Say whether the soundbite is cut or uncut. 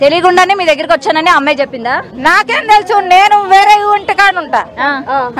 uncut